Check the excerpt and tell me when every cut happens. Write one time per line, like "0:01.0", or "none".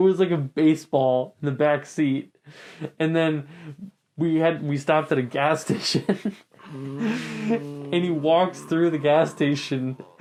none